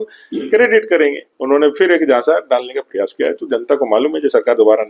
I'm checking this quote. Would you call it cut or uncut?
cut